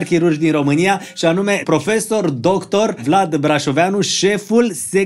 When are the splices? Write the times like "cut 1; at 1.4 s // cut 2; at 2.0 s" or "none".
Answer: cut 1; at 1.6 s // cut 2; at 3.0 s